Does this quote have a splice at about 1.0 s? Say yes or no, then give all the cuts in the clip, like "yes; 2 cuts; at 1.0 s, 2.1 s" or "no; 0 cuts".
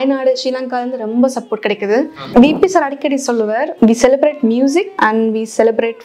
no; 3 cuts; at 2.2 s, 3.7 s, 4.9 s